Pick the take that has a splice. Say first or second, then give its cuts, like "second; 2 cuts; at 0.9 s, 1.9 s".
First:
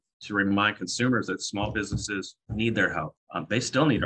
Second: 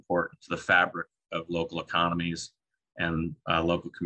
first; 2 cuts; at 2.4 s, 3.2 s